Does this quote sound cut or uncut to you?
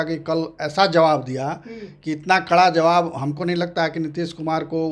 uncut